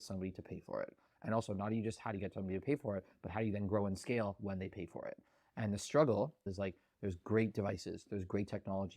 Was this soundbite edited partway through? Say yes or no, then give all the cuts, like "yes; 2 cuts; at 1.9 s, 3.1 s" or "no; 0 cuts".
yes; 1 cut; at 6.5 s